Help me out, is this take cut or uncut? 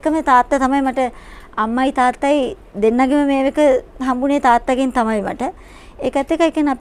uncut